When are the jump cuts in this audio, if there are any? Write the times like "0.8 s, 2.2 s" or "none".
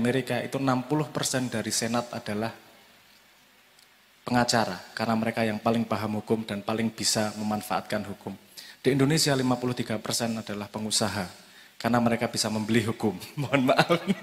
none